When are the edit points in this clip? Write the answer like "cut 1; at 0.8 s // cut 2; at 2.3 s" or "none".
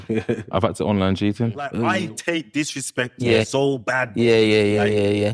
cut 1; at 1.8 s